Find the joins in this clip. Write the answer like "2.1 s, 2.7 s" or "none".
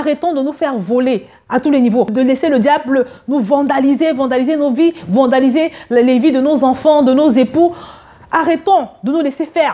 2.1 s